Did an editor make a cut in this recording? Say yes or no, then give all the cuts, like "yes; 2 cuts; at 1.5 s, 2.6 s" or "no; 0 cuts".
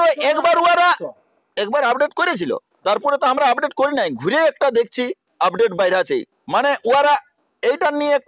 no; 0 cuts